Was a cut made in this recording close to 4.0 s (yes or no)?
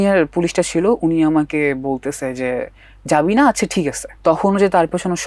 yes